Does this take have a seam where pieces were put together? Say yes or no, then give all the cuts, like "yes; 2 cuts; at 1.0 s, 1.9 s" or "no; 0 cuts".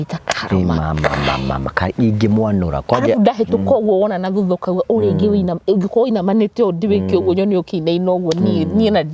no; 0 cuts